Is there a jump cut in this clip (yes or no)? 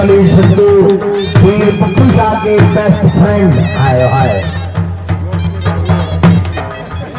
no